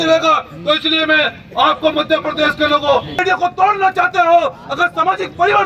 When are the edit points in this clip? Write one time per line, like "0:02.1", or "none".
0:03.2